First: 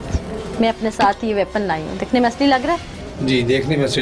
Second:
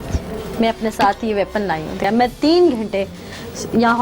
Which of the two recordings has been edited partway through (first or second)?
second